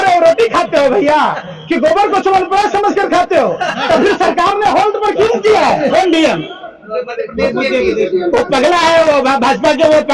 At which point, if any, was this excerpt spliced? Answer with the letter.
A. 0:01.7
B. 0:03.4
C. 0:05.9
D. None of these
C